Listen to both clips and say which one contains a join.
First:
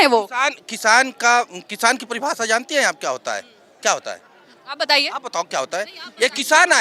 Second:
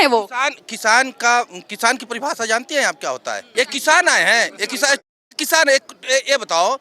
second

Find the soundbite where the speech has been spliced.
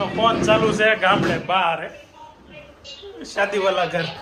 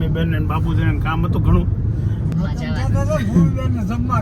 second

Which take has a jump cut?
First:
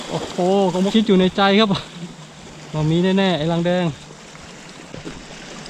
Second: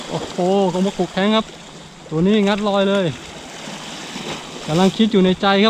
first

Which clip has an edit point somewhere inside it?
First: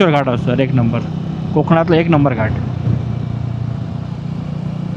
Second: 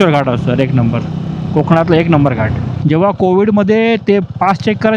second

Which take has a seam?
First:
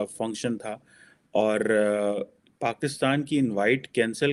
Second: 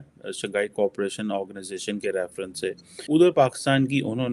second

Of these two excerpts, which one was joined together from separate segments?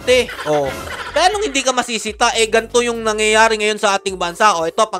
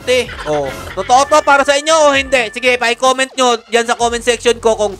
second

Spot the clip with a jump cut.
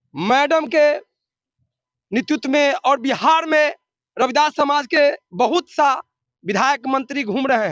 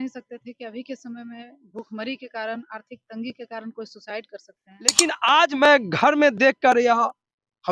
second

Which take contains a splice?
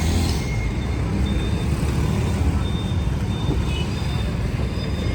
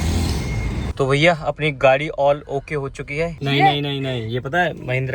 second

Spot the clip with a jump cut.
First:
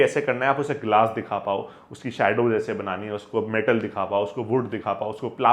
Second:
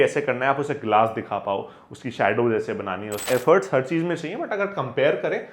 second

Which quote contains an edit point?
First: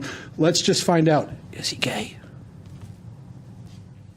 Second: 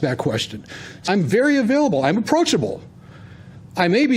second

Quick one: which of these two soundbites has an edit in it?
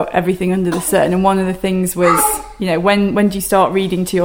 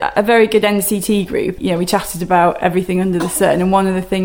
second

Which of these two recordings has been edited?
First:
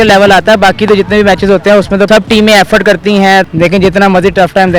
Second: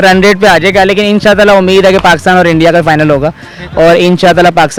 first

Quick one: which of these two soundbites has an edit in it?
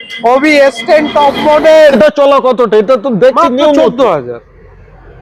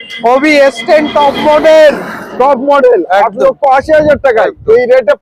first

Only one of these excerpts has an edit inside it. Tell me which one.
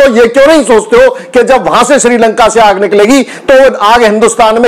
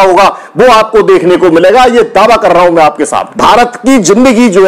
second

